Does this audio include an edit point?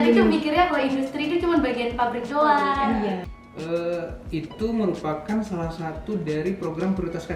yes; 1 cut; at 3.2 s

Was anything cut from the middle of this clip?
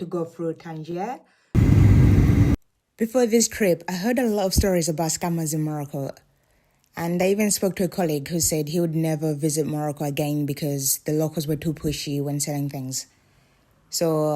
yes; 1 cut; at 1.5 s

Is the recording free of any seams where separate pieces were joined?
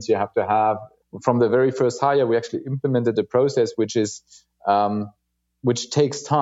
no; 1 cut; at 1.0 s

